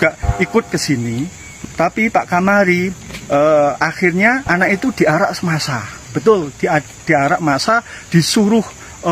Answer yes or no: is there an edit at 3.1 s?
no